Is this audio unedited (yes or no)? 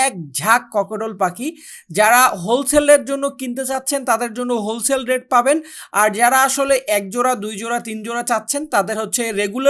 yes